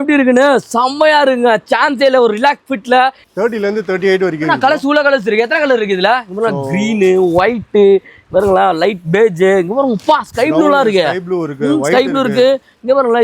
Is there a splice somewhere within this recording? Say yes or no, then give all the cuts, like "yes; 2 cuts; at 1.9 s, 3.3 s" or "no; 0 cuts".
no; 0 cuts